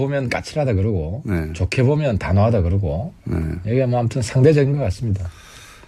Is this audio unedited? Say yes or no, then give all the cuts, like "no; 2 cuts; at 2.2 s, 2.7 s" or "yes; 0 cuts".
no; 1 cut; at 3.8 s